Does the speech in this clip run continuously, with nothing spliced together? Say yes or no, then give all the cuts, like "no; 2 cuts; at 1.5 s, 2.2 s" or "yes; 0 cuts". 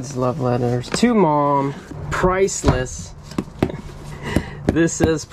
yes; 0 cuts